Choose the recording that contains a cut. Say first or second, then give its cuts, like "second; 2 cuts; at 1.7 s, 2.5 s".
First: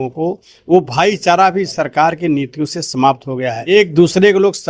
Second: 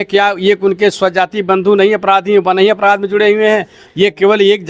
first; 1 cut; at 3.7 s